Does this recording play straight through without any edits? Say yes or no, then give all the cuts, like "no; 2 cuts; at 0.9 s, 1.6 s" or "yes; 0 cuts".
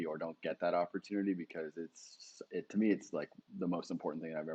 yes; 0 cuts